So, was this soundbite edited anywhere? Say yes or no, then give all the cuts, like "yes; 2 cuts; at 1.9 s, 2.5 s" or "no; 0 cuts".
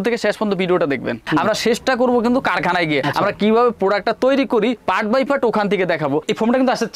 yes; 2 cuts; at 1.2 s, 6.2 s